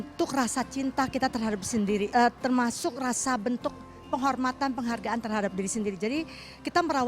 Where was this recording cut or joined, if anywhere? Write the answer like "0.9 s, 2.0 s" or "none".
2.1 s